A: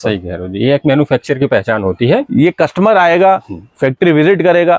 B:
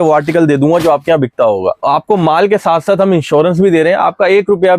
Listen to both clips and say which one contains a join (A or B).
B